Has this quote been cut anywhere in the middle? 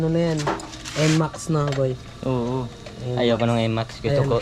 no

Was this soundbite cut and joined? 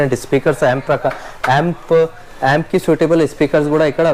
no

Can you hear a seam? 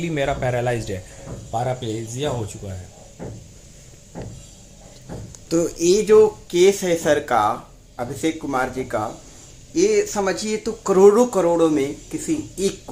no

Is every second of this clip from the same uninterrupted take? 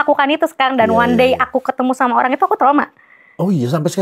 yes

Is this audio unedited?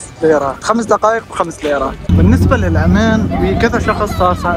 no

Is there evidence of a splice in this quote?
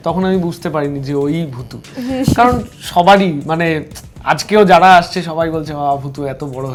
no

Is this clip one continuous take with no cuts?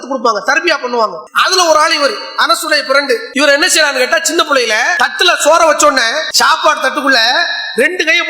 no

